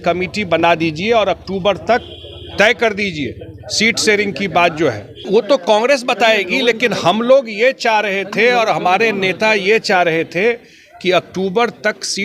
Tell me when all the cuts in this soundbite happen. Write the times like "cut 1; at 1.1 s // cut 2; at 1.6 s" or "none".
cut 1; at 5.3 s